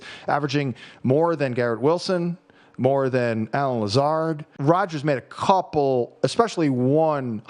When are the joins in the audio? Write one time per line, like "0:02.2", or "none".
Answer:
0:04.5